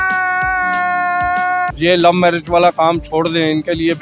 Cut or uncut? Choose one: cut